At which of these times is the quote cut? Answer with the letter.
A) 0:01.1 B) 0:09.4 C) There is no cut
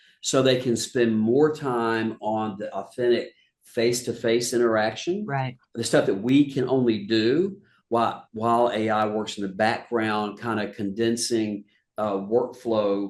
C